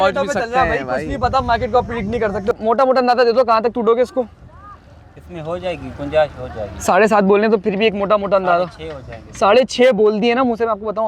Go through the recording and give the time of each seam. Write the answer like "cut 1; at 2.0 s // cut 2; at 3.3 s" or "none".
cut 1; at 2.5 s